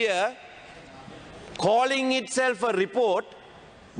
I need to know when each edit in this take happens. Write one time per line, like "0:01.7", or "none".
none